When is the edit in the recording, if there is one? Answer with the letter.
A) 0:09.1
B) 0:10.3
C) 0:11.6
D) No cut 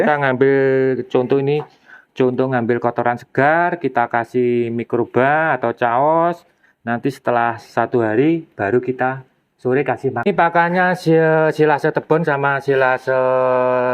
B